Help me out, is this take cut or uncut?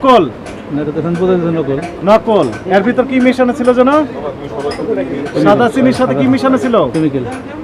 uncut